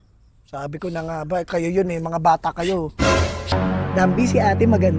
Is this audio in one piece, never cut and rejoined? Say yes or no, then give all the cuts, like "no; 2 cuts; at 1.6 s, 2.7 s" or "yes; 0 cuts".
no; 1 cut; at 3.5 s